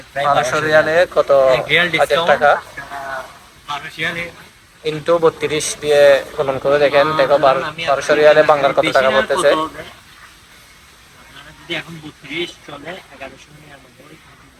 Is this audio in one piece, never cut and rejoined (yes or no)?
yes